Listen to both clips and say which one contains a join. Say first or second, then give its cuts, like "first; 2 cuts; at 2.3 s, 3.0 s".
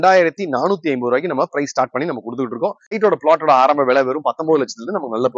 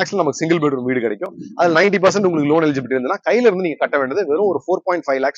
first; 1 cut; at 2.9 s